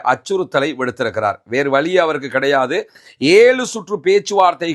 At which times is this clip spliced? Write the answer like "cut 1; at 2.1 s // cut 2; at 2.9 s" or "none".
cut 1; at 3.0 s